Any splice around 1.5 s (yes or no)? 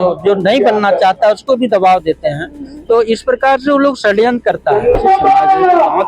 no